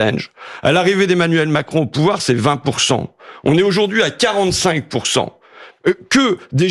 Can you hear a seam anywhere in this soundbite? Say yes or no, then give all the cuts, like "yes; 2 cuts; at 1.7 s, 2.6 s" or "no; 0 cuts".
no; 0 cuts